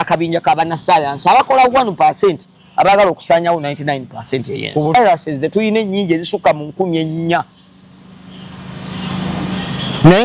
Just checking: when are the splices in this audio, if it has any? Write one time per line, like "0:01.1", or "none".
0:04.9